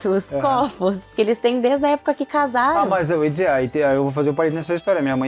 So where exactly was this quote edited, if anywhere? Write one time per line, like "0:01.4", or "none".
0:01.1